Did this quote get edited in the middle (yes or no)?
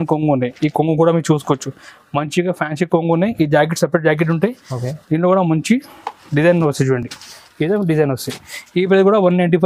no